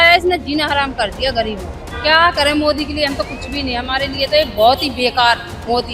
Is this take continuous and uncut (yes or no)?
no